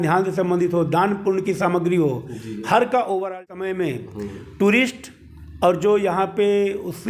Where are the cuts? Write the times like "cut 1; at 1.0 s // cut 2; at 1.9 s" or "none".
cut 1; at 3.4 s